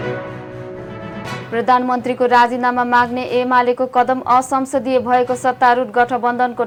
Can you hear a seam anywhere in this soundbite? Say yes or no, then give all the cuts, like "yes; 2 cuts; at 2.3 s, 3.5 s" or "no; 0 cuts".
no; 0 cuts